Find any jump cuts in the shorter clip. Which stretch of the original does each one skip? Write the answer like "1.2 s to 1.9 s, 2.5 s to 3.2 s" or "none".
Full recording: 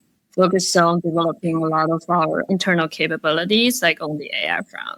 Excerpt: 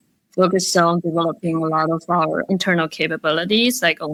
none